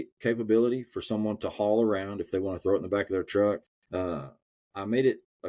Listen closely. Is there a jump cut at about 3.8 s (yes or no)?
yes